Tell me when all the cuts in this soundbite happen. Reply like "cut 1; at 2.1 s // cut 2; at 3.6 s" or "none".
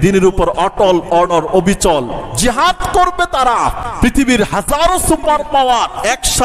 cut 1; at 3.8 s